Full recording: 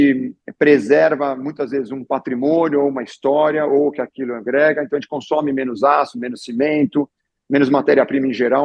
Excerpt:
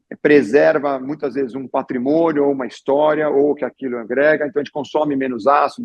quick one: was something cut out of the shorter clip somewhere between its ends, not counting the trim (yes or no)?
no